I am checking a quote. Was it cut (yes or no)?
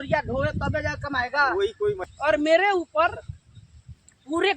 yes